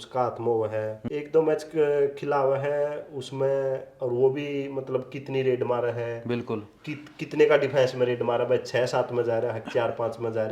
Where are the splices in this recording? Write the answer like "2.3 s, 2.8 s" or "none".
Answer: 1.0 s

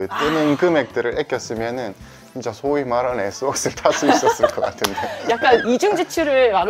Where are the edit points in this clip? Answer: none

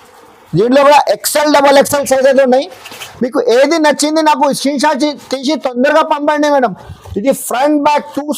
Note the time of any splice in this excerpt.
6.8 s

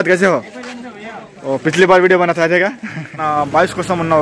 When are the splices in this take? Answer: 3.2 s

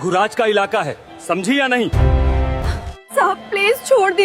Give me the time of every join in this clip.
2.6 s

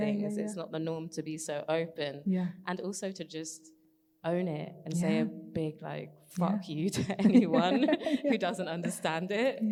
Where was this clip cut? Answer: none

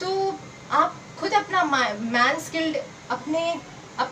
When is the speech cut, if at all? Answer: none

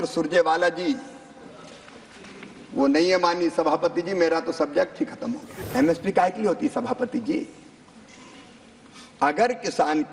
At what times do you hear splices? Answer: 5.5 s

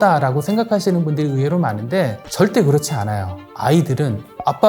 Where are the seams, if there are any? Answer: 3.3 s

